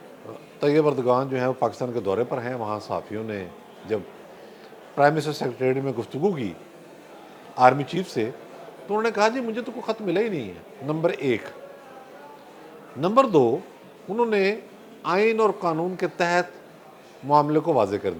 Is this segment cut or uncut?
uncut